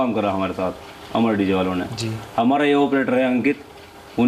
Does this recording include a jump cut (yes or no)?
no